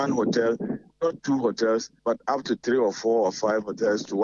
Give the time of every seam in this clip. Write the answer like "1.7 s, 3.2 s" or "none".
1.9 s